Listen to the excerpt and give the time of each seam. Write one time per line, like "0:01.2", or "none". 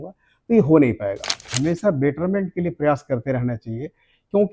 0:01.5